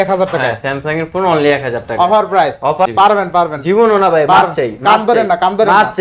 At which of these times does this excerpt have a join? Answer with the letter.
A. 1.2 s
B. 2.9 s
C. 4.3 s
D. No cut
B